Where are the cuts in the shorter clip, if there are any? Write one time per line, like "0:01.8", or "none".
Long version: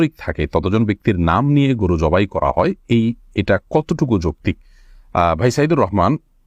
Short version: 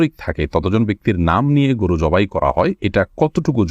0:02.8